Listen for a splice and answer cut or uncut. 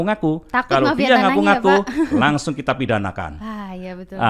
uncut